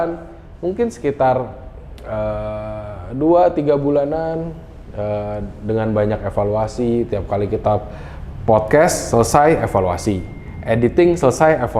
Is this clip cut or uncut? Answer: uncut